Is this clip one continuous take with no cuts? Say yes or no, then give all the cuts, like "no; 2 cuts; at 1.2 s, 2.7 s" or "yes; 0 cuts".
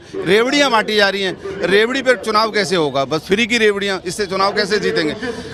yes; 0 cuts